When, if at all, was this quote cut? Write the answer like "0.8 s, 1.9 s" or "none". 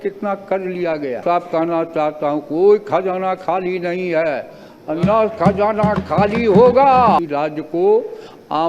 1.2 s, 7.2 s